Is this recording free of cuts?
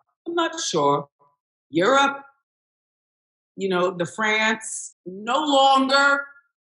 no; 1 cut; at 5.1 s

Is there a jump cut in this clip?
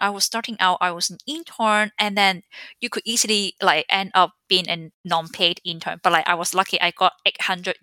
yes; 1 cut; at 4.9 s

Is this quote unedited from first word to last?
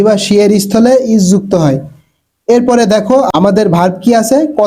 no; 1 cut; at 3.3 s

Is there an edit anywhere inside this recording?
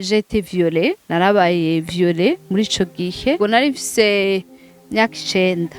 yes; 1 cut; at 3.4 s

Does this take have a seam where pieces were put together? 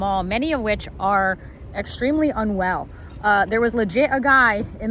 no; 0 cuts

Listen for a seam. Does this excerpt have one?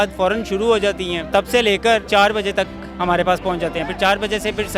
yes; 2 cuts; at 1.2 s, 2.0 s

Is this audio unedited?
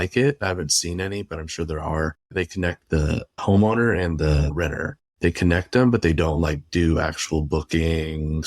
no; 3 cuts; at 2.3 s, 3.4 s, 4.5 s

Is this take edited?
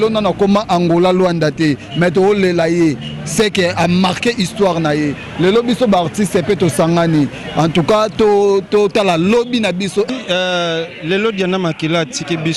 yes; 1 cut; at 10.1 s

